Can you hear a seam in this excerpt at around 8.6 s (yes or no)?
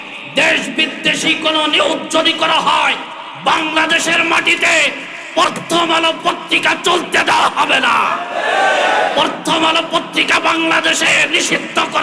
no